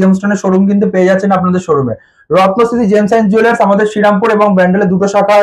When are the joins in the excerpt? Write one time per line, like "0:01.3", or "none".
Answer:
none